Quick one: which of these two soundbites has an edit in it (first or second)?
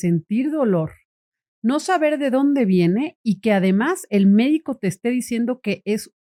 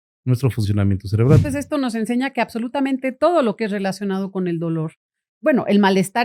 second